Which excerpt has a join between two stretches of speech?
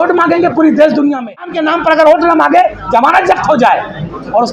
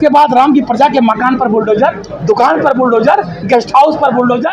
first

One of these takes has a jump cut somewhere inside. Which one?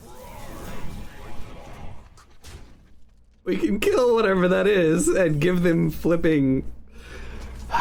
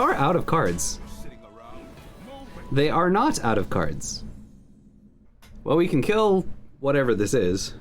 second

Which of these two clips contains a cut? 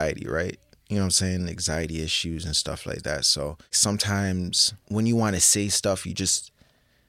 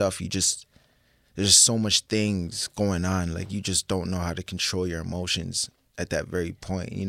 first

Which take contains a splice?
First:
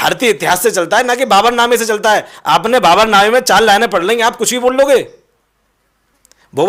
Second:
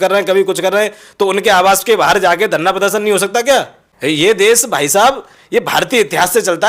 second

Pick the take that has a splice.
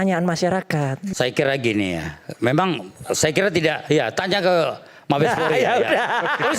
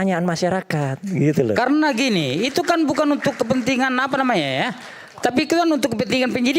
first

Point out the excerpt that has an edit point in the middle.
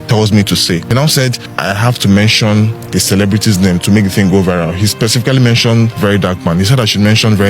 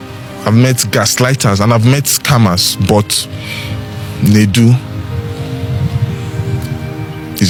first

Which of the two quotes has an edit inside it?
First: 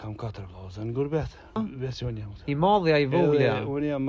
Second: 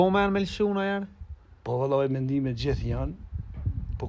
first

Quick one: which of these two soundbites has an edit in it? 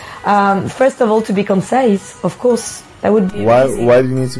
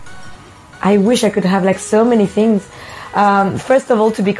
first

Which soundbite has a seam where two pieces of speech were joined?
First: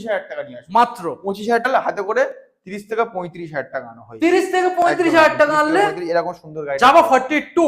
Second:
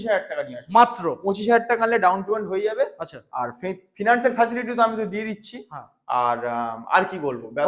first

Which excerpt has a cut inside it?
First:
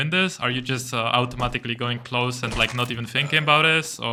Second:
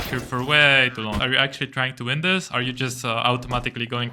second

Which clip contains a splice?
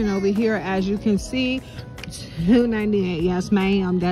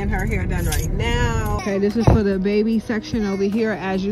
second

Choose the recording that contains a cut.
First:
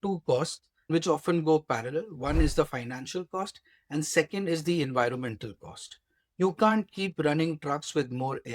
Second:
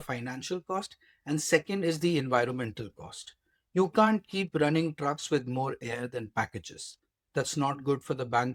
first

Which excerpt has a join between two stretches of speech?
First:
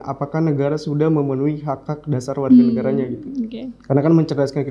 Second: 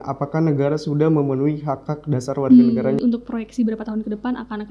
second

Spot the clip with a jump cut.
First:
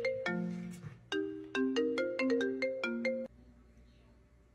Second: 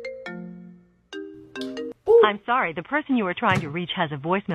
first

